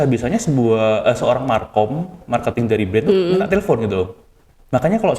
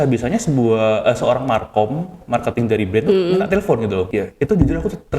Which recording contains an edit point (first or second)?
second